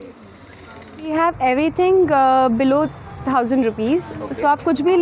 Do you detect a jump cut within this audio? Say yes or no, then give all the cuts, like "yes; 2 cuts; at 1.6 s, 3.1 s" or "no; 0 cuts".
yes; 1 cut; at 1.1 s